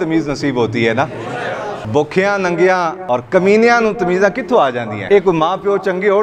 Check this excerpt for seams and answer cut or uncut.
cut